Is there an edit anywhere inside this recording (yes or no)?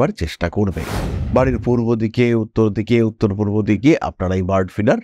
yes